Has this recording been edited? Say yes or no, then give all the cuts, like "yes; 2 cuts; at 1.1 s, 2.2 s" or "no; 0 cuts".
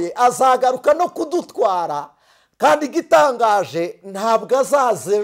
no; 0 cuts